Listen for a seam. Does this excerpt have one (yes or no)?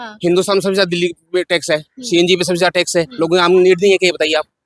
no